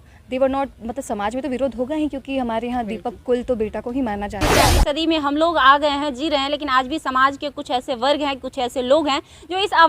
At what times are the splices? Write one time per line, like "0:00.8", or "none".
0:04.7